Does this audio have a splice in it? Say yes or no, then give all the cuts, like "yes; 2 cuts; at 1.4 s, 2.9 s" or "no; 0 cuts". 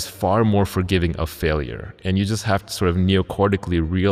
no; 0 cuts